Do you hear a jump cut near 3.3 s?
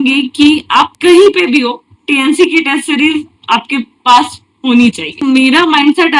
no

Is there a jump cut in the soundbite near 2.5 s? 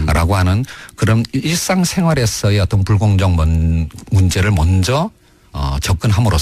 no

